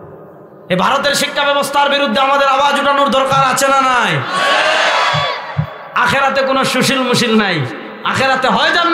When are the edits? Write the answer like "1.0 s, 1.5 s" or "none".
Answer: 5.8 s